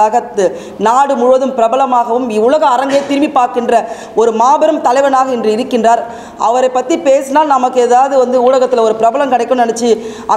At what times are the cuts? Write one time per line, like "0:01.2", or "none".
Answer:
none